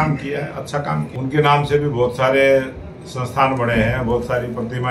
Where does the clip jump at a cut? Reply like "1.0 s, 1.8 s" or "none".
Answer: 1.1 s

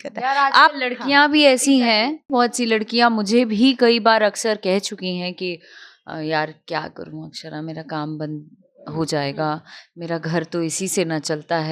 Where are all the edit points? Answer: 2.2 s

